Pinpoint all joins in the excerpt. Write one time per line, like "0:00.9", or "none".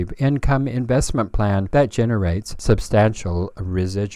0:01.7
0:02.5